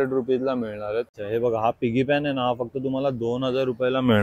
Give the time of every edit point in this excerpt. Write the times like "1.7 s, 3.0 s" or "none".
1.2 s

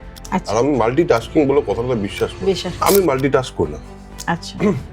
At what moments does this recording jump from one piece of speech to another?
2.7 s

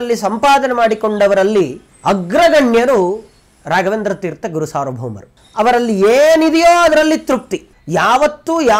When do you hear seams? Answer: none

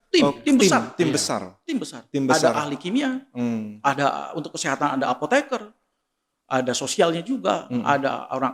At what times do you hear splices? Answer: none

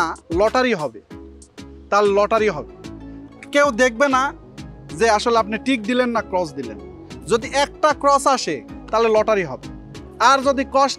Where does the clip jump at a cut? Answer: none

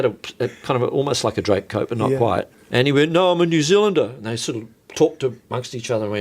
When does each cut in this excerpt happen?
2.6 s

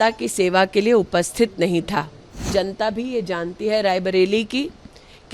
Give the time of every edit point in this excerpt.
2.5 s

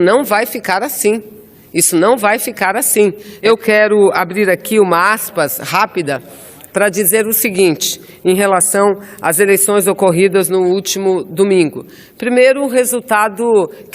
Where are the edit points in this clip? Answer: 3.3 s

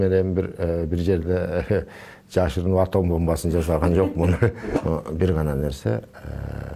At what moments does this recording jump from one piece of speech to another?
4.7 s

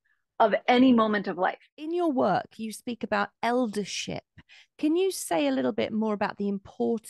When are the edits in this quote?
1.7 s

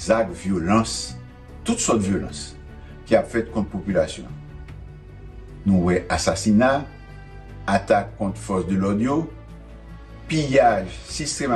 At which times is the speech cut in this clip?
none

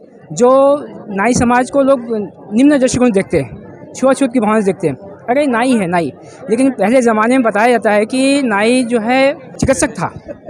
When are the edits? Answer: 9.5 s

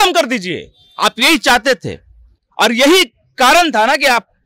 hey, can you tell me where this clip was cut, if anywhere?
none

